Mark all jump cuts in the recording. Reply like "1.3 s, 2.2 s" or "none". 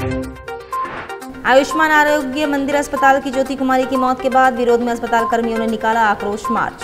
1.2 s